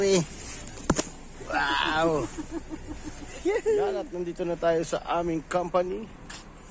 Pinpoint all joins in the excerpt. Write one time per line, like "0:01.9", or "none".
0:04.0